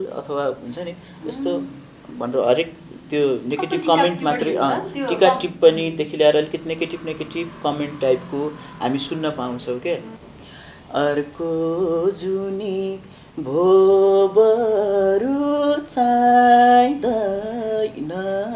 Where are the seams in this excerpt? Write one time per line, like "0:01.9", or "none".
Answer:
0:10.2